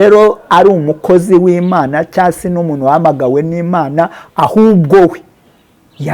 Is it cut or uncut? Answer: uncut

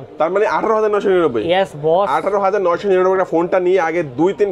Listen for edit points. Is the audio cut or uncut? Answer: uncut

